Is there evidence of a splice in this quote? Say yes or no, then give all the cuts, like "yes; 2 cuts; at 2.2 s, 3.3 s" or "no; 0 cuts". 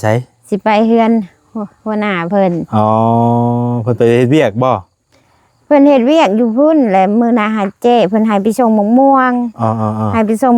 no; 0 cuts